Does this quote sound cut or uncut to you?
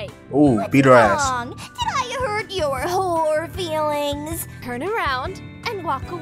cut